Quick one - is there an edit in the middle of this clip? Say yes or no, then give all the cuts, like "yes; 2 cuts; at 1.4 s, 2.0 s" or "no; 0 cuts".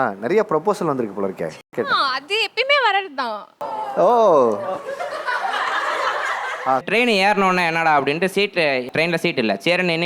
yes; 1 cut; at 6.8 s